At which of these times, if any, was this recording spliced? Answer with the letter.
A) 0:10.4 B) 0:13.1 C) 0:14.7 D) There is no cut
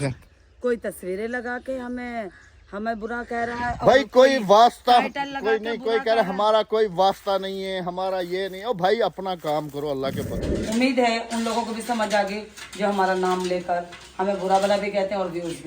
A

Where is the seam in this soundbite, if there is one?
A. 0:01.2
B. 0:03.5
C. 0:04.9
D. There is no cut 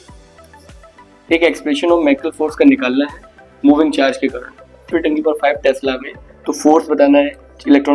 C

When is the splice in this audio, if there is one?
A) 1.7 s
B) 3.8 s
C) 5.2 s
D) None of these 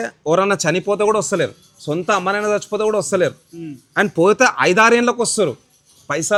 D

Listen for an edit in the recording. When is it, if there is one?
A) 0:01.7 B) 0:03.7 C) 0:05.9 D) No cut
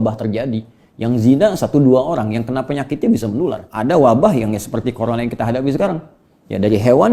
B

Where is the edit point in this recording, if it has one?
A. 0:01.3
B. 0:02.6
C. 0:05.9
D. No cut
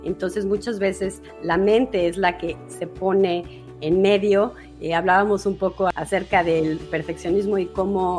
C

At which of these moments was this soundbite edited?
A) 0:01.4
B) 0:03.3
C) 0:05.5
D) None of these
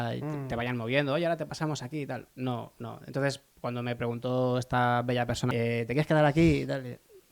C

